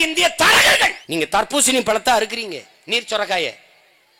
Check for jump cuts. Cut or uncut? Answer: cut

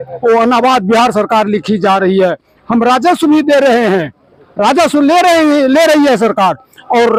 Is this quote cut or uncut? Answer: uncut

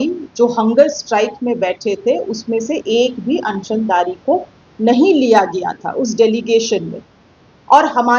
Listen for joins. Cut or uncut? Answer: uncut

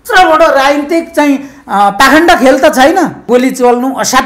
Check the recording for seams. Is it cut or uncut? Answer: cut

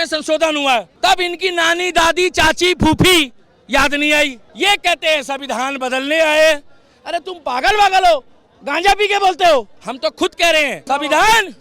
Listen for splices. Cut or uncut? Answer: cut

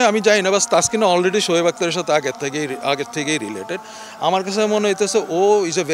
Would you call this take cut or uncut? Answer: uncut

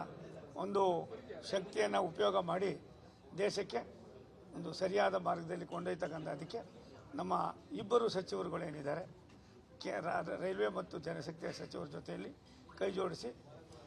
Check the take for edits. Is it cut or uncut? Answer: cut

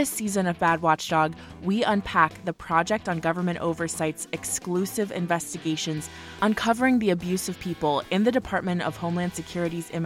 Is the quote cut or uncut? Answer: uncut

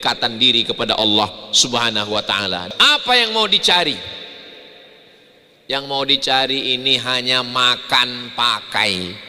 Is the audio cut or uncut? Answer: cut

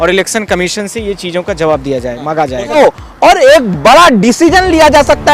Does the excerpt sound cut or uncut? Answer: cut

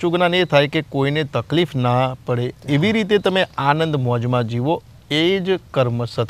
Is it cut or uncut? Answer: uncut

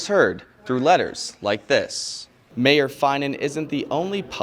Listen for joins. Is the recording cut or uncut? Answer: cut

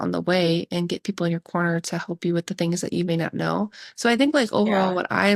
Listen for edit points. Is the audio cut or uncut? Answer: uncut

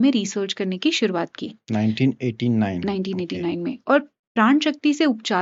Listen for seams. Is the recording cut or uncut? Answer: uncut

